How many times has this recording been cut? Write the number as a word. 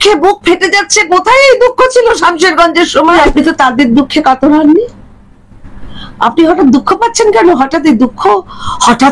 one